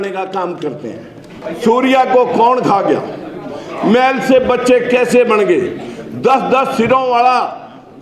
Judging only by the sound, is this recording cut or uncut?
cut